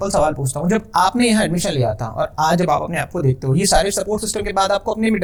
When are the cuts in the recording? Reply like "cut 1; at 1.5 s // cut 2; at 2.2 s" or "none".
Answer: none